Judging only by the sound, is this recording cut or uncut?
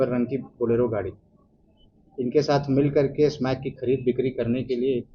uncut